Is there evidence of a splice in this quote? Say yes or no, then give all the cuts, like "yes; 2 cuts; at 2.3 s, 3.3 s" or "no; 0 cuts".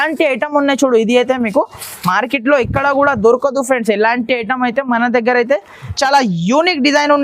yes; 1 cut; at 5.8 s